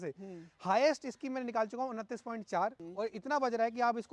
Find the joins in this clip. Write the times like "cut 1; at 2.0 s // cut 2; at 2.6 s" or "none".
cut 1; at 2.8 s